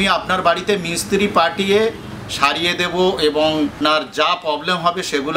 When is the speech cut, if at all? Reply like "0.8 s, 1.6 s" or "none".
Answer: 3.7 s